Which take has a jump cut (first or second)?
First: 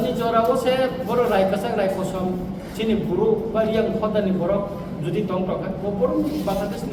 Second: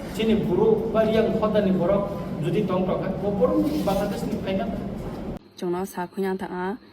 second